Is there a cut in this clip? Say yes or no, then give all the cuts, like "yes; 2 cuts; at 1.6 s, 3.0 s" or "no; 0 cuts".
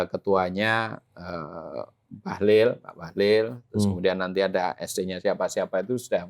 no; 0 cuts